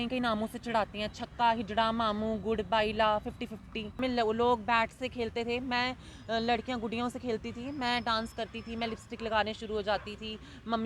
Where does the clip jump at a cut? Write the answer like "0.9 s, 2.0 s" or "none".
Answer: 4.0 s